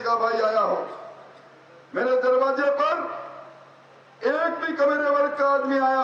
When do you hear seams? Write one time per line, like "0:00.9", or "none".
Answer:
none